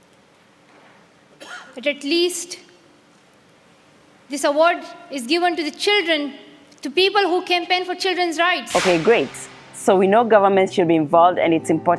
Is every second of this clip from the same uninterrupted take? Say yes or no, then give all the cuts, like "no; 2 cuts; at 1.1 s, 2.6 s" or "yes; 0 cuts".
no; 1 cut; at 8.6 s